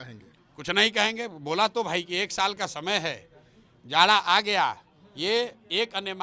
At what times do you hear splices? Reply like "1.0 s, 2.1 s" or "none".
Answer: none